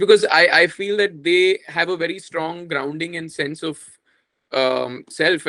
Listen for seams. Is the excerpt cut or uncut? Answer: uncut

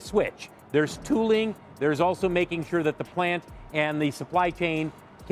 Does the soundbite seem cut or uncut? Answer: uncut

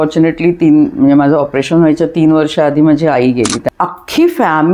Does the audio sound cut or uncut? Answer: cut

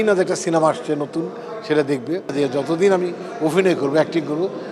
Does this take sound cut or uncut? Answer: cut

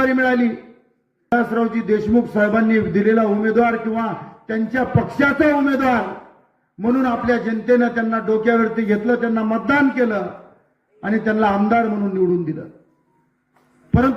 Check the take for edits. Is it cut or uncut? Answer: cut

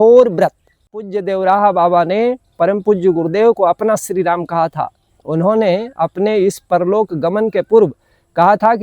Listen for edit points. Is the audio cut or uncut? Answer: cut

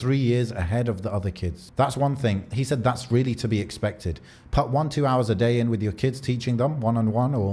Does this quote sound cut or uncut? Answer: cut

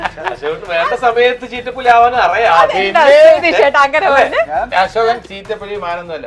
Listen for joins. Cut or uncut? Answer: cut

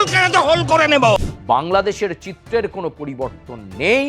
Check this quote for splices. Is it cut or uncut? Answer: cut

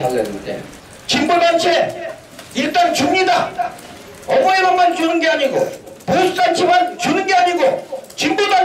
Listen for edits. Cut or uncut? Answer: uncut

